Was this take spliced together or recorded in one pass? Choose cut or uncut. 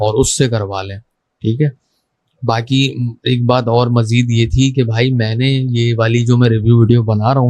uncut